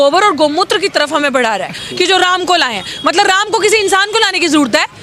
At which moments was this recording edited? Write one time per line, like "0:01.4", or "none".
0:01.8